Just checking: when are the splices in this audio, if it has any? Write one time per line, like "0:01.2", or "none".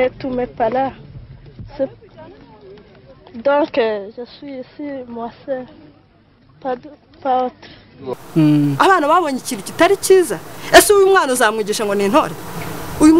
0:08.1